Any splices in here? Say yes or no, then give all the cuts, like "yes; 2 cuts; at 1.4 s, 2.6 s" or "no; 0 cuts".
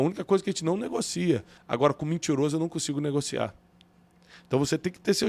yes; 1 cut; at 1.5 s